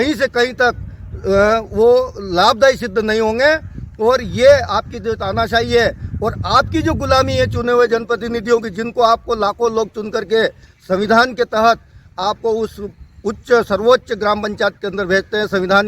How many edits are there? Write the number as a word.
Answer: zero